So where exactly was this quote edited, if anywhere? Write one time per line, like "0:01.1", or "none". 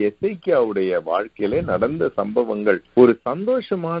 0:02.8

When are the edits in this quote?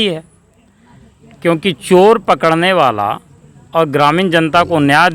none

